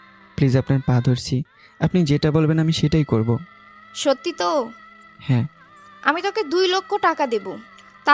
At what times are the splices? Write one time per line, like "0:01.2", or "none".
none